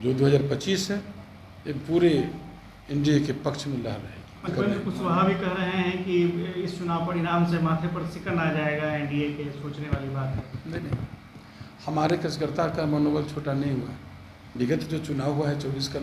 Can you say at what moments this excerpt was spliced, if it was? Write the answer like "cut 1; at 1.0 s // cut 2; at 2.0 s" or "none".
cut 1; at 4.4 s // cut 2; at 14.5 s